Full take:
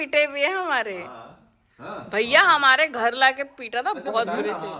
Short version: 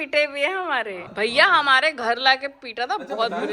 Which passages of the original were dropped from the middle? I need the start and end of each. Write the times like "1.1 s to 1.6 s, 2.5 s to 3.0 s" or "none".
1.1 s to 2.0 s